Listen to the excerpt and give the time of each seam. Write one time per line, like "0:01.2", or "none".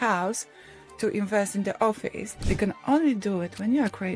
0:02.4